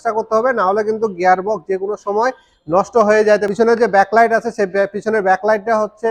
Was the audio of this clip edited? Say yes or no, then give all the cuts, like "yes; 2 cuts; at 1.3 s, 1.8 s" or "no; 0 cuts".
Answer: yes; 1 cut; at 3.5 s